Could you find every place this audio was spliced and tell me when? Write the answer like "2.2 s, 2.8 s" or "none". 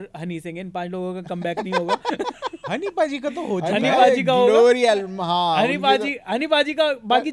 none